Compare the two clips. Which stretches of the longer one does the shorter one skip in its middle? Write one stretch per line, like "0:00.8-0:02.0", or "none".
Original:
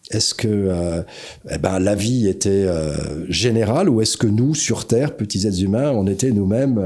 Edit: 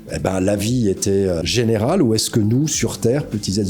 0:02.8-0:03.3